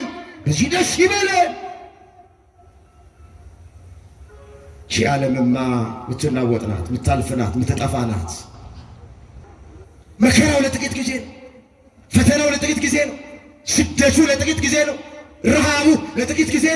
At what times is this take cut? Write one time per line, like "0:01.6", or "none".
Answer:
0:09.4